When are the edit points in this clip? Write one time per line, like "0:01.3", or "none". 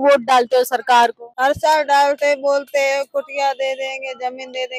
0:01.2